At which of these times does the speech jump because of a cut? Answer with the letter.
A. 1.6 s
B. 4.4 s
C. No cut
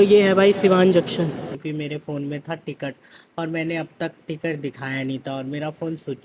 A